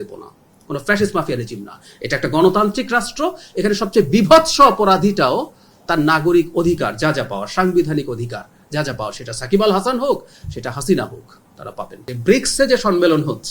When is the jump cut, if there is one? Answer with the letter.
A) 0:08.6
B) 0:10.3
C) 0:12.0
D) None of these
C